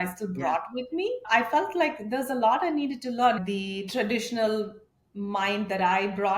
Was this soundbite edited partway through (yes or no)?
yes